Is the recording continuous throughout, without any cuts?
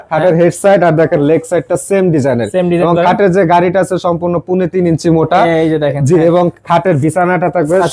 yes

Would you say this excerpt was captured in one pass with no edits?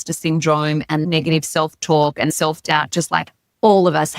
no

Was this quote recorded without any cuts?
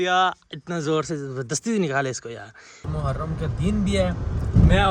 no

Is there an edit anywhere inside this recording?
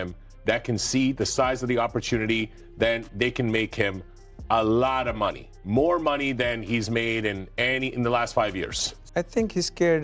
yes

